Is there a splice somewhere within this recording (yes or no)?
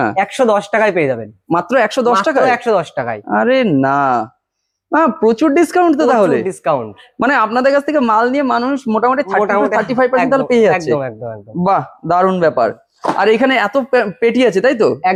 no